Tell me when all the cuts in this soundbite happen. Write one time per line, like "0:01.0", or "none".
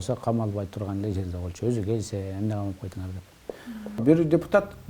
0:04.0